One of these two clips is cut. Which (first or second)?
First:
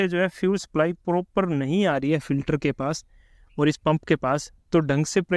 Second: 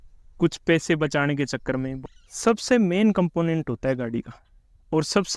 second